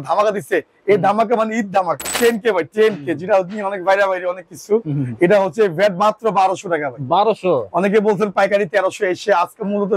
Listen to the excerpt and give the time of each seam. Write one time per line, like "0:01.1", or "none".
0:02.1